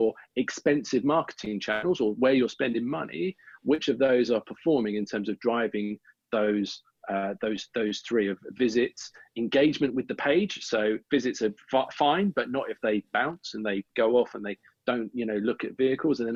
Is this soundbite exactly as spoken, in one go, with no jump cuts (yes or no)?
yes